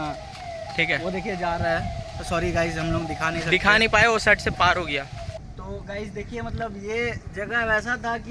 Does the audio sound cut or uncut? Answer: cut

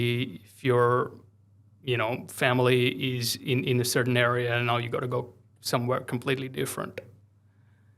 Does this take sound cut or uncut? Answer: uncut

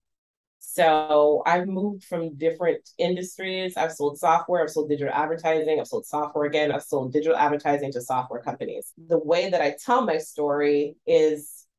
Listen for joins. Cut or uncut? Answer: cut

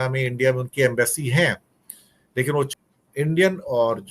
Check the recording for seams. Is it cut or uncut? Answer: cut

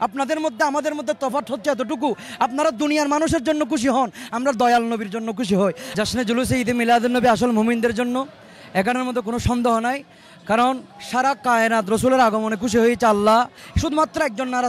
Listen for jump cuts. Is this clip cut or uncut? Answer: cut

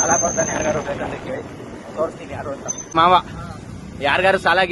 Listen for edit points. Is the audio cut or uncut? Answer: cut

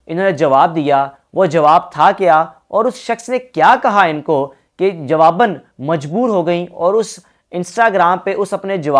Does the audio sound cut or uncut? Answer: uncut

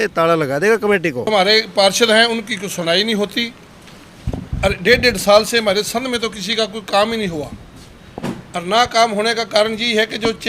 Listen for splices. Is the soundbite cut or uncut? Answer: cut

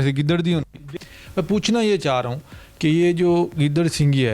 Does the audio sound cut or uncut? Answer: cut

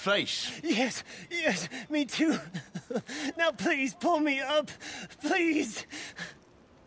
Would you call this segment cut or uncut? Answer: uncut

